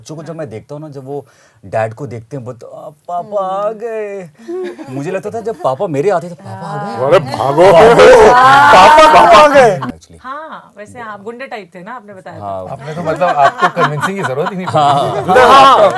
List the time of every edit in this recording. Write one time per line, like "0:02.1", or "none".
0:09.8

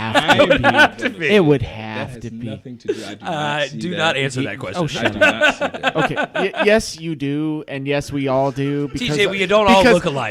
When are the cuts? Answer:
none

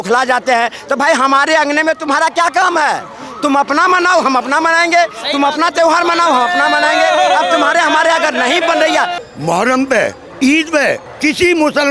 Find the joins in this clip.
0:09.2
0:11.1

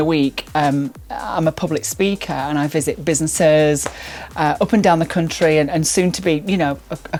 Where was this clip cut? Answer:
none

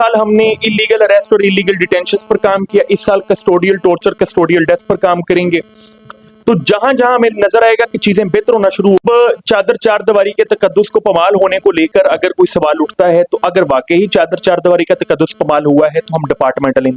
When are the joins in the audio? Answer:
0:09.0

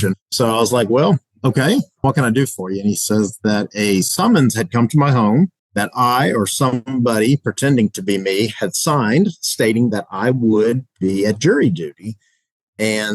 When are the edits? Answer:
0:02.0

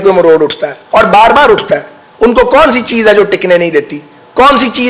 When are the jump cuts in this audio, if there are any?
none

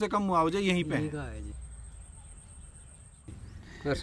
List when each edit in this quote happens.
none

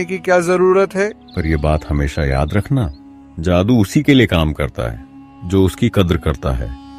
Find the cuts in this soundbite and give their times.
0:01.2

